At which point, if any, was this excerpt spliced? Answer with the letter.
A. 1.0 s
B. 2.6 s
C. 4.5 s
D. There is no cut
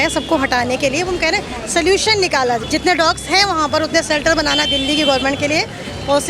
B